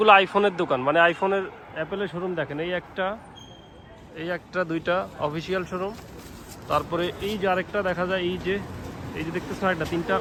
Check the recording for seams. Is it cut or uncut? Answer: uncut